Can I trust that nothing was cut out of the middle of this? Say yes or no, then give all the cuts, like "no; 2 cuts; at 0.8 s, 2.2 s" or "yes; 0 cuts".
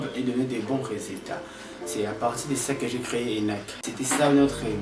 no; 1 cut; at 3.8 s